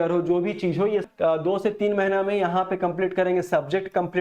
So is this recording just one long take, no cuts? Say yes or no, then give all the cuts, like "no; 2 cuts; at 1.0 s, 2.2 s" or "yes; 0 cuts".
no; 1 cut; at 1.0 s